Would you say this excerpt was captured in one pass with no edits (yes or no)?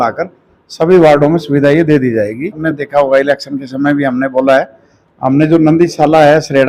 no